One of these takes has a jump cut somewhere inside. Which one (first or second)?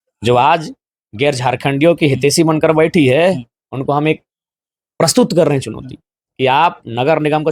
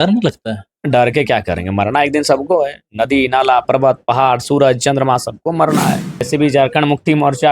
second